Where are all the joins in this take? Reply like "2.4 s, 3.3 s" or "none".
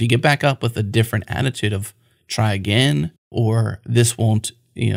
3.2 s